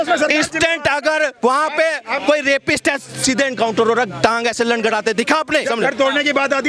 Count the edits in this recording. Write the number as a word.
one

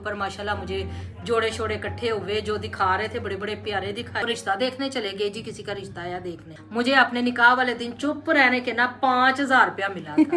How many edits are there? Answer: two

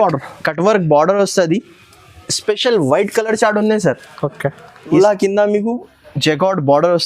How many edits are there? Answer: one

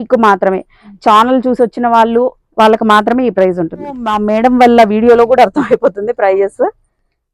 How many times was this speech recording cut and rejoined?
one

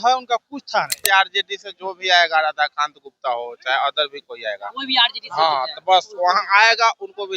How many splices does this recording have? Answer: one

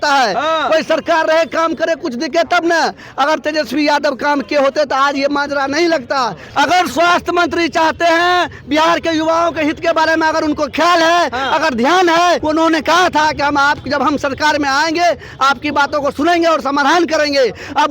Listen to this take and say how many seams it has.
two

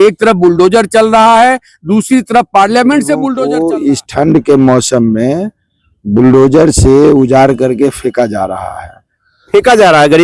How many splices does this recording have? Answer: one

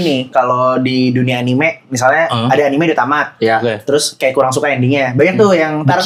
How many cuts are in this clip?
zero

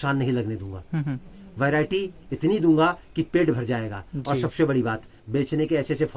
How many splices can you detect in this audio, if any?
zero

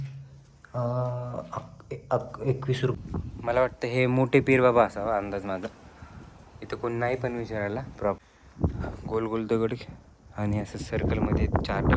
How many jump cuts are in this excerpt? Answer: two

